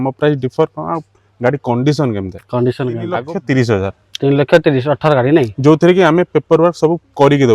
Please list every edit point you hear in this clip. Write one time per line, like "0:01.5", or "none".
0:03.2